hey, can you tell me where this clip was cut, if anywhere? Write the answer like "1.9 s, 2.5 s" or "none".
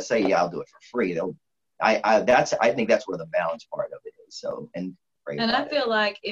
1.5 s, 5.1 s